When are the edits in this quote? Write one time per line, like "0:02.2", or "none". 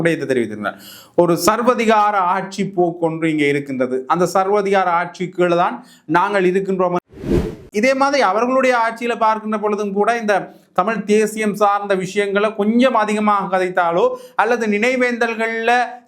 0:07.4